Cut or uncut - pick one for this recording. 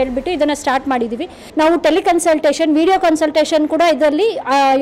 cut